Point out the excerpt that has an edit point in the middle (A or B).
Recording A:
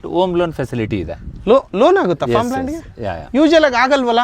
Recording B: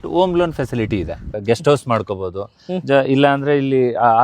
B